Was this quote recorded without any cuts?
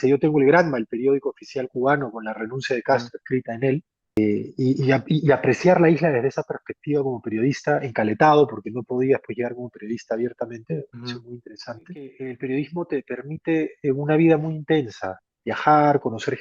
no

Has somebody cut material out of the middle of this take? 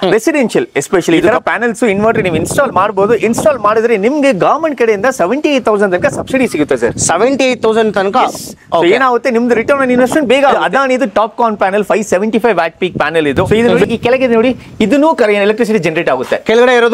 yes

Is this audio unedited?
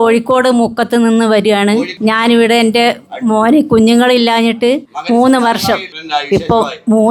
no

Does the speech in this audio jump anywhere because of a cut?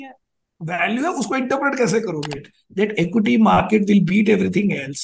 yes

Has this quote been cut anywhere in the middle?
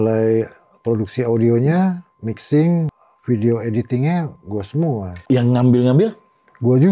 yes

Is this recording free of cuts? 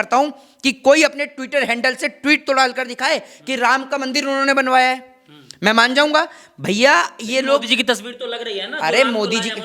yes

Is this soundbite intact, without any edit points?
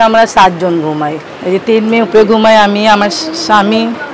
no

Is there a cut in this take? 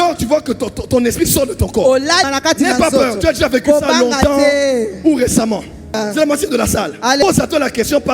yes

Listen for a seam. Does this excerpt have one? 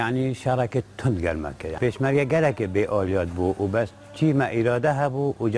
no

